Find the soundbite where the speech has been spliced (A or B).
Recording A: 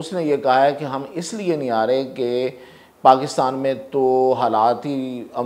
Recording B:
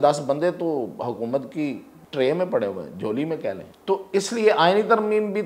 B